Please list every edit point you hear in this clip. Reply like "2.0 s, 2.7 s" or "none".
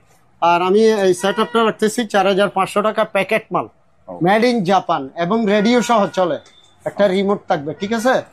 none